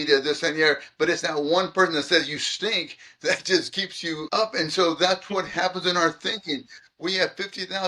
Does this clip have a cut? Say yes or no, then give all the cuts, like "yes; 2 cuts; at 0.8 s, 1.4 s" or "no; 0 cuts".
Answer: yes; 1 cut; at 4.2 s